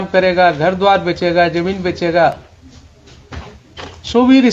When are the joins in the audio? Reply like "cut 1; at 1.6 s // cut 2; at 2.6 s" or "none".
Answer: none